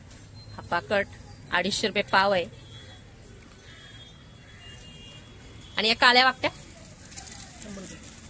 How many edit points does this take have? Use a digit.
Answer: 0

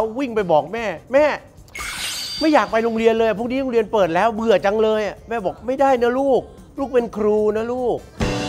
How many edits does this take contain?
0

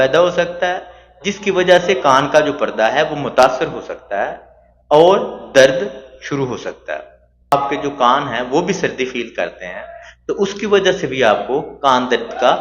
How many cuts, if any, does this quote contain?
1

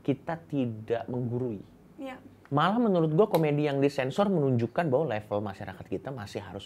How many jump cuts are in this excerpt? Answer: 1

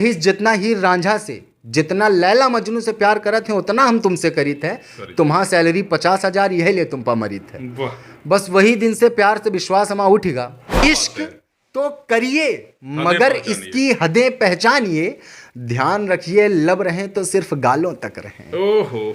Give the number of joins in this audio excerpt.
1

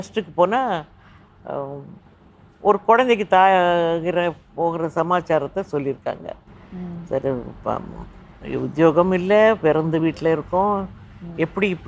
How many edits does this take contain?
0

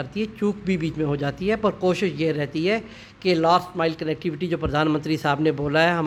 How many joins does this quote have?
0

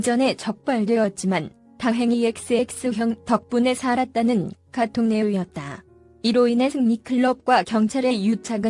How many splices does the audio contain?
0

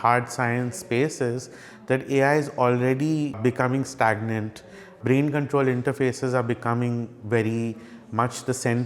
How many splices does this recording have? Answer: 2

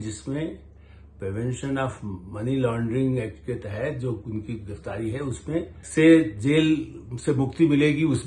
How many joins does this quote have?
1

